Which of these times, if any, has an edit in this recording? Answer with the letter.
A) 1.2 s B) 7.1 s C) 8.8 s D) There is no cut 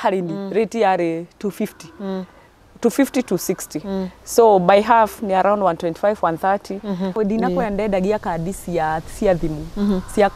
B